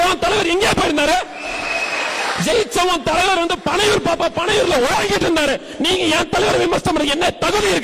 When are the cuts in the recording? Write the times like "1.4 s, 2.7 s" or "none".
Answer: none